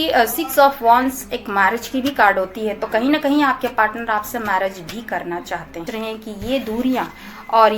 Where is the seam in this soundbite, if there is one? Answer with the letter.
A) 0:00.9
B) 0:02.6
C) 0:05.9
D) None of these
C